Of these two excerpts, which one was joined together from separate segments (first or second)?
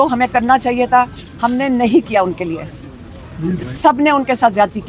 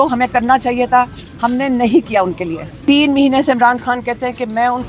second